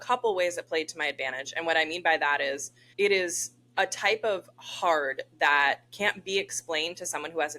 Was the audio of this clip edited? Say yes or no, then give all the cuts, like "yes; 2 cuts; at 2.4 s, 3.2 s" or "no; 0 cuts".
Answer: yes; 1 cut; at 2.7 s